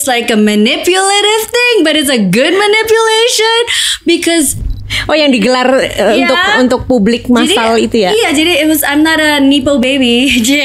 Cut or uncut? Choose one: cut